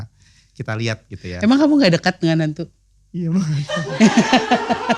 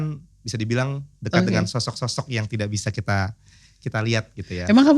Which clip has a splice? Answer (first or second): second